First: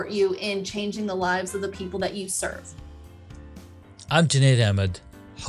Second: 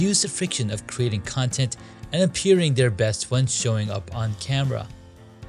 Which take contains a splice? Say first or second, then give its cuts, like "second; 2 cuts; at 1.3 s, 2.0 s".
first; 2 cuts; at 2.8 s, 4.0 s